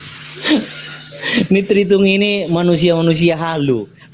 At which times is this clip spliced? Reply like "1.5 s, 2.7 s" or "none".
none